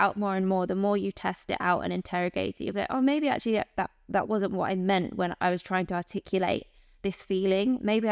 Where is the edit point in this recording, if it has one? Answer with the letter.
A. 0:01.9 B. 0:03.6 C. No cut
C